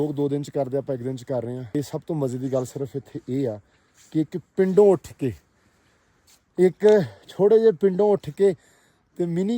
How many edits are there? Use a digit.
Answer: 1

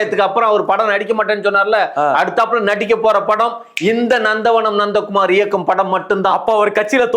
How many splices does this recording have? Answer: 0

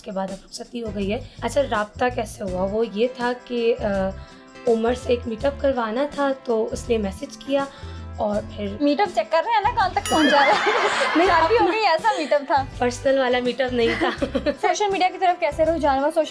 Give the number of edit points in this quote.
2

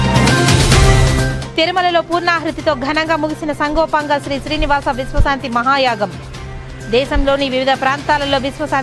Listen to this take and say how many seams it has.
1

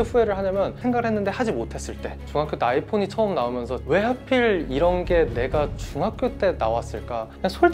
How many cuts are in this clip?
1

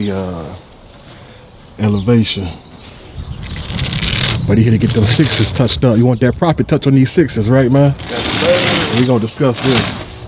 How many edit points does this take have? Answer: 1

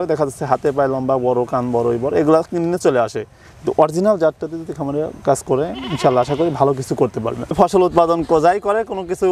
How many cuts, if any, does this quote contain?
1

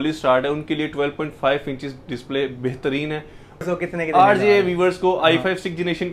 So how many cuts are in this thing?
1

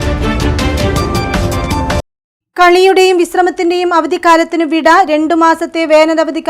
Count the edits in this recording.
1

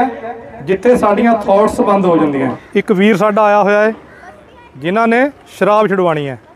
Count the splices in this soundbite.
1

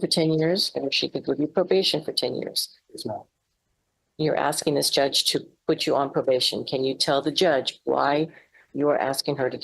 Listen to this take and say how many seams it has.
0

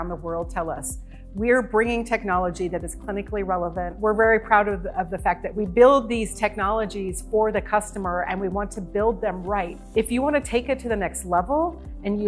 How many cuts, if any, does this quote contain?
2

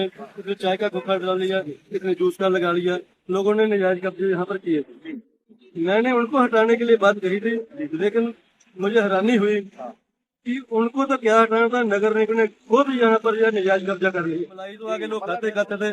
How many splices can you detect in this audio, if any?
1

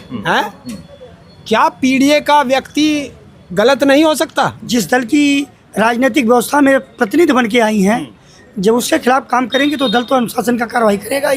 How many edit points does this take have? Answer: 1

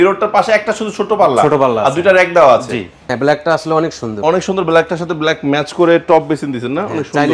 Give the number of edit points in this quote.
1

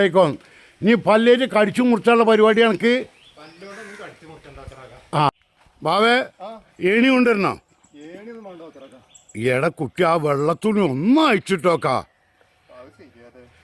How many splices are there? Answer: 1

